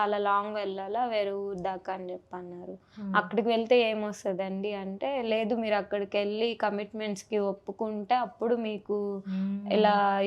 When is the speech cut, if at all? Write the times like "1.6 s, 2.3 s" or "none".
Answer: none

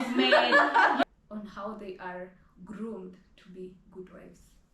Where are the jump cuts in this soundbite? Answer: 1.0 s, 2.8 s

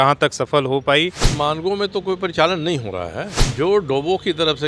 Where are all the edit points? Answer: 1.2 s, 3.4 s

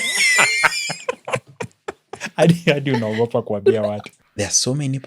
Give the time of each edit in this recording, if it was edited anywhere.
4.1 s

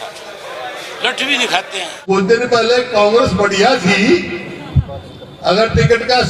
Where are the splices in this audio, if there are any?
2.1 s

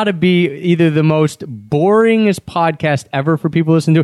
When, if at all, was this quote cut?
none

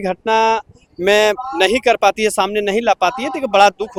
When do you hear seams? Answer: none

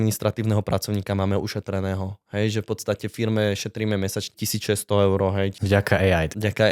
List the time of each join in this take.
4.3 s, 5.6 s

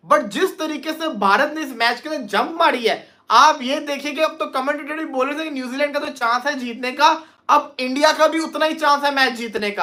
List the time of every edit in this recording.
none

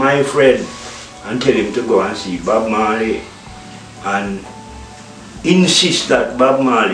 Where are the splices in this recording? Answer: none

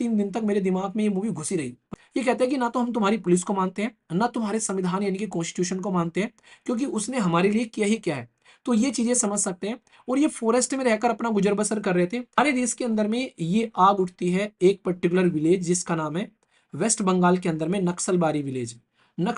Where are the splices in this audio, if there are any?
1.8 s, 12.4 s

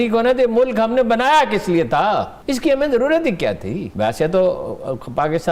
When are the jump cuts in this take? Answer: 2.3 s, 3.9 s

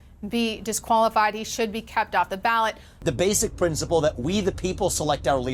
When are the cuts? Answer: 2.9 s

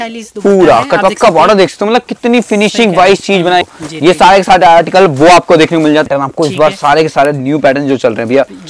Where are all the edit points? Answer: 3.6 s, 6.1 s

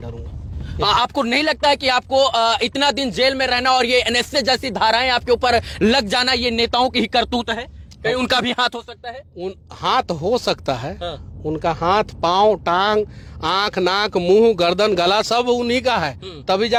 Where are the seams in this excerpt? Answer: none

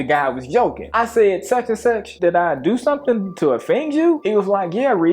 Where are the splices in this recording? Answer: 0.9 s, 2.1 s

